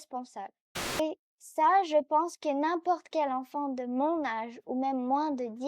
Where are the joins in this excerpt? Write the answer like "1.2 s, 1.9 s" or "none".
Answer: 1.0 s